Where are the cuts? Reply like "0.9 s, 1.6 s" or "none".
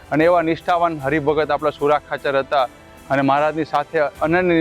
none